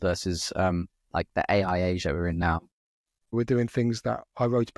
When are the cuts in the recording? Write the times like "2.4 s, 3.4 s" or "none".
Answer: 3.3 s